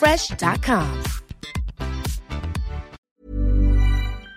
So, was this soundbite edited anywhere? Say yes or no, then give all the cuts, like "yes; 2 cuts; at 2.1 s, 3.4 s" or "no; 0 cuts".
yes; 1 cut; at 3.0 s